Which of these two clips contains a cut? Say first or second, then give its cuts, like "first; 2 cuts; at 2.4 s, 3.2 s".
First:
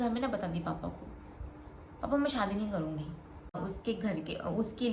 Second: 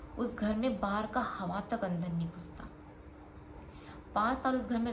first; 1 cut; at 3.6 s